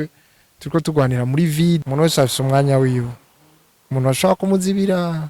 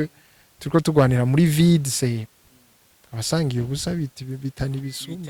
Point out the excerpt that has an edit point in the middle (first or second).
first